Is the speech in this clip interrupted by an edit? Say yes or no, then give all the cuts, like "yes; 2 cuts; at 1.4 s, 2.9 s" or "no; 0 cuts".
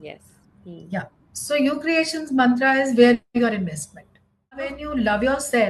yes; 1 cut; at 4.8 s